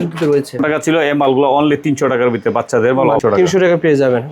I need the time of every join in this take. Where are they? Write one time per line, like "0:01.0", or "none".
0:03.3